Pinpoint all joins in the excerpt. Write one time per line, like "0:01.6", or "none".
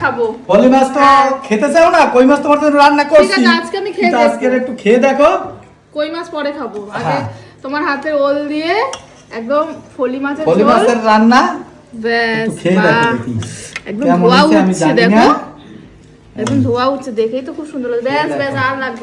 none